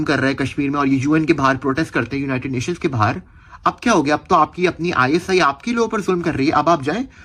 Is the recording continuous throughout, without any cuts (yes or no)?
yes